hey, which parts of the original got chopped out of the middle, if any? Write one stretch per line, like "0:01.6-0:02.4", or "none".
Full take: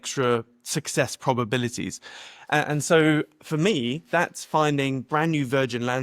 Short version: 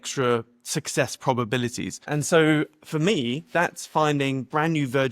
0:02.1-0:02.7

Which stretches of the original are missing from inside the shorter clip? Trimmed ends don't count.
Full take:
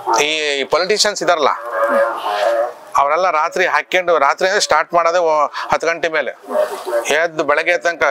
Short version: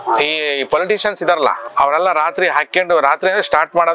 0:01.6-0:02.8

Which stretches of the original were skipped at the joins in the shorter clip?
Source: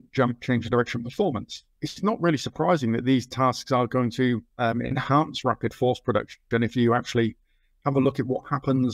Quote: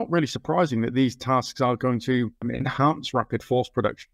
0:04.5-0:04.7

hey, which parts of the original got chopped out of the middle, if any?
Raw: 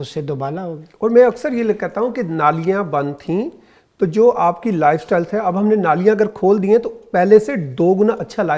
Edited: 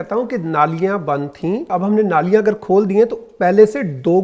0:03.5-0:05.4

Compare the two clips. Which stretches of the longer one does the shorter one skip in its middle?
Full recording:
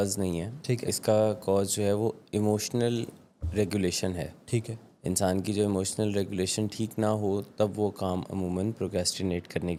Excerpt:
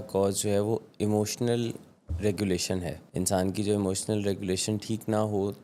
0:04.3-0:04.9

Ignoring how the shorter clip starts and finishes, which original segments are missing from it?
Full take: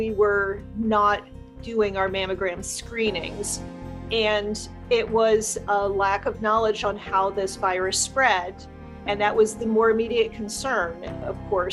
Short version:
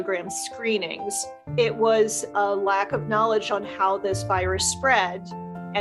0:03.7-0:04.7

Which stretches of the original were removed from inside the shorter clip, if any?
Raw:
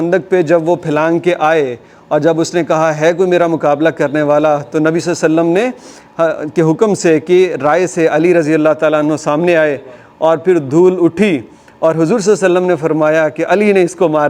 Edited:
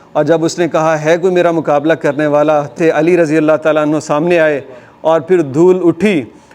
0:04.7-0:07.9

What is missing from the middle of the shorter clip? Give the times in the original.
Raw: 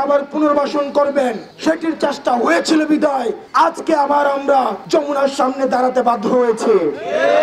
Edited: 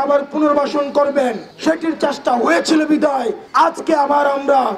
none

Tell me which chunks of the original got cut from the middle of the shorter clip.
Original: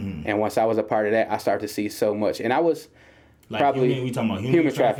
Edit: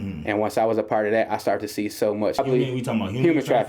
0:02.4-0:03.7

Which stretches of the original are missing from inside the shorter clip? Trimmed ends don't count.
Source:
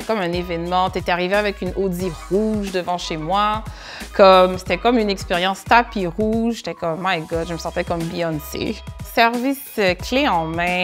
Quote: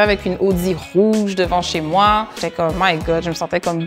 0:03.8-0:06.7

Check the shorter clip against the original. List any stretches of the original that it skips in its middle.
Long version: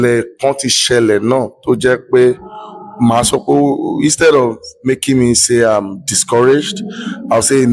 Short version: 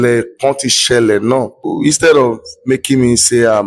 0:01.6-0:03.8

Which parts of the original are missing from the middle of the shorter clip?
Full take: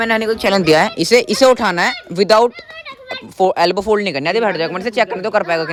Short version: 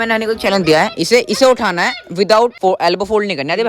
0:02.6-0:03.3

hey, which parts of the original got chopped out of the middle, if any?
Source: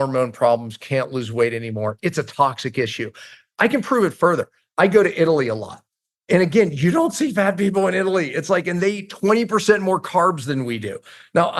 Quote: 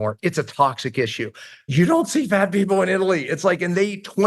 0:03.5-0:06.7

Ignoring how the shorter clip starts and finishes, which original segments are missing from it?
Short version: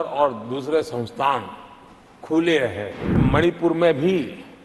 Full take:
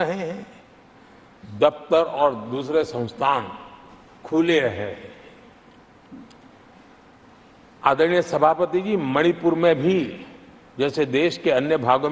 0:05.2-0:09.0

